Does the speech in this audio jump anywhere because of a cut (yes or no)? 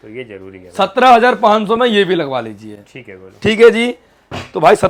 no